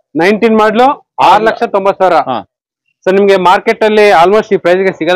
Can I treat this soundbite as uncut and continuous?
yes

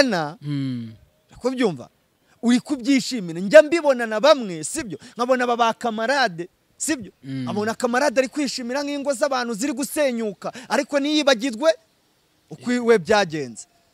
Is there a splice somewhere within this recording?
no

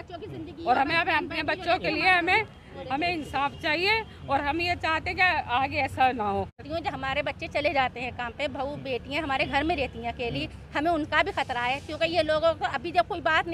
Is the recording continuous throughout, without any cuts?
no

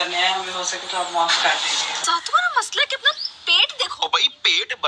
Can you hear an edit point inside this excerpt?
yes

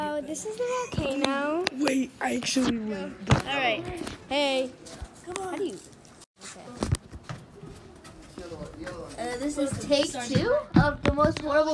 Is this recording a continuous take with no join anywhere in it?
no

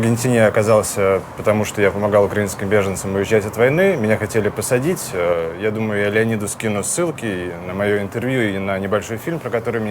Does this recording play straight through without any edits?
yes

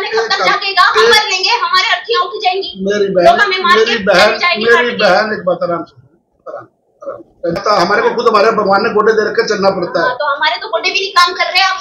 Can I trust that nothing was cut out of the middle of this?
no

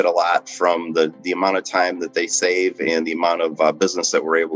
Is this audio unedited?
yes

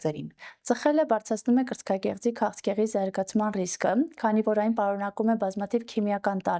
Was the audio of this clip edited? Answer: no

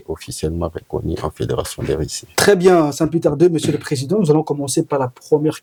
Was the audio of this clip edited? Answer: no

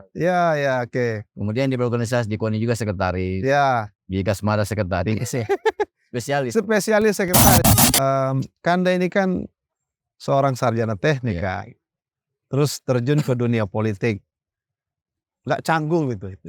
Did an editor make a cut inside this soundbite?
yes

